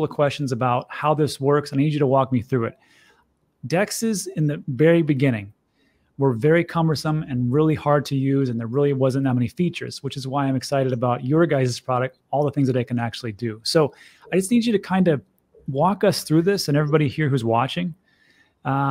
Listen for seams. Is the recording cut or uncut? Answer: uncut